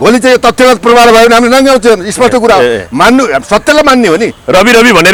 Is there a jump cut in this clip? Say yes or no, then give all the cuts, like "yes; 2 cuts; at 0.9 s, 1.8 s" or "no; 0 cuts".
no; 0 cuts